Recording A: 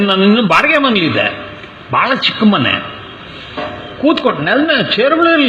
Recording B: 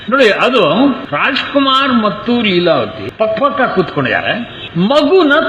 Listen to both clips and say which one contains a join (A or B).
B